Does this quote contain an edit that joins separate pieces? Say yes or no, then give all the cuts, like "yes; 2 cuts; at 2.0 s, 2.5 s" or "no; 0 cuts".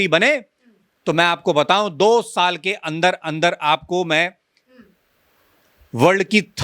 no; 0 cuts